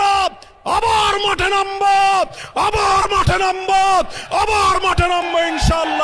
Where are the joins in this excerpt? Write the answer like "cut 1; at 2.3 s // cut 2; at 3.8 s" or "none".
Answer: none